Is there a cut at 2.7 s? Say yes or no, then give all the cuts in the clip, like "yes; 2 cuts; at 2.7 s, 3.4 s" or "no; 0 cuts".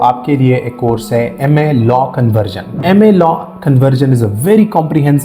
yes; 1 cut; at 2.7 s